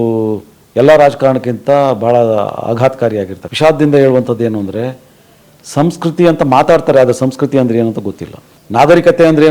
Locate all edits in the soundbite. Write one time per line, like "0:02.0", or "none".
0:03.4